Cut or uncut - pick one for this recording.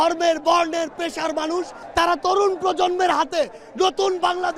cut